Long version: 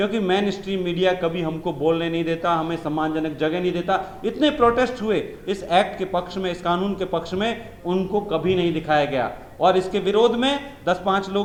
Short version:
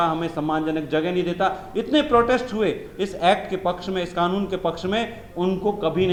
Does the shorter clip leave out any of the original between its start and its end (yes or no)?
no